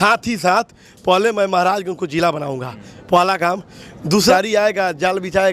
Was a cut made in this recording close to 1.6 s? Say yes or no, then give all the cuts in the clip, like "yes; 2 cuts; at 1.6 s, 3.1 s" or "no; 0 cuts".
no; 1 cut; at 4.3 s